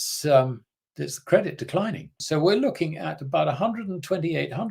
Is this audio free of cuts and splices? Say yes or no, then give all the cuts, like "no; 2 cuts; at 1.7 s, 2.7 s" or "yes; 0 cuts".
no; 1 cut; at 2.1 s